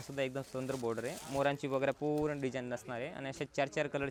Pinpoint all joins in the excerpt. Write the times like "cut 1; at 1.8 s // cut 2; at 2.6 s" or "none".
none